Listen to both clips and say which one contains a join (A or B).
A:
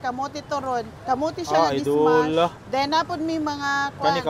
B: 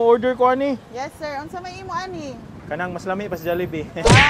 A